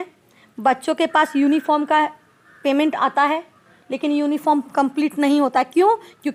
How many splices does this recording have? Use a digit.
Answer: 0